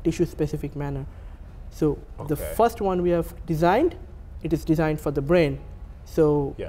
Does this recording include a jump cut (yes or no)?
no